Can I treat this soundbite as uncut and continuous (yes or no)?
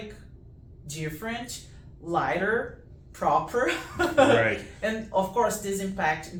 yes